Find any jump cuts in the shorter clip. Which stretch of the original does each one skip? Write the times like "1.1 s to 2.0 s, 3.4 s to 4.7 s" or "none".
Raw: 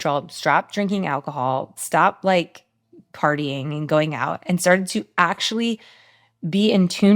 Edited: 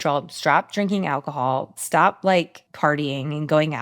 2.6 s to 3.0 s